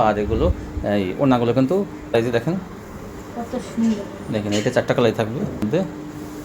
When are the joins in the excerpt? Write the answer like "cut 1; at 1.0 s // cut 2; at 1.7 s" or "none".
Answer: cut 1; at 2.1 s // cut 2; at 5.7 s